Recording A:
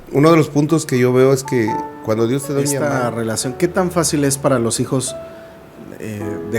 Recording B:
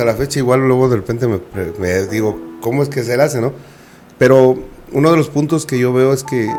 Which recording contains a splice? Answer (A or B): A